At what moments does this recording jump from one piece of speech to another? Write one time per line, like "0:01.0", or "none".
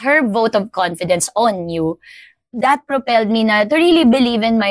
none